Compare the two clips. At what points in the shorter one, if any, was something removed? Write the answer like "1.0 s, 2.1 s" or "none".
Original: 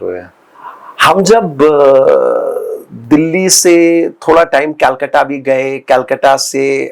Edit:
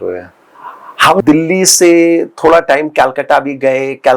1.2 s